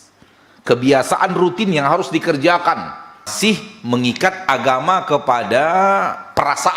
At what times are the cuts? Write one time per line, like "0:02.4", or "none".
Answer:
0:03.3